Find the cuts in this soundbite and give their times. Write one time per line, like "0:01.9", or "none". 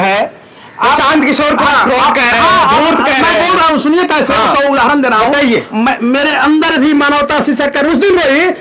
none